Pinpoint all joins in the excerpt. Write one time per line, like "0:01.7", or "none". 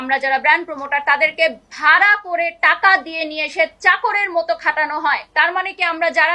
0:05.2